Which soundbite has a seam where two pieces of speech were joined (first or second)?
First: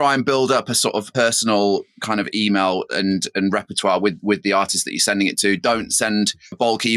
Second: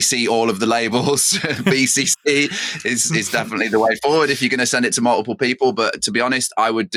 first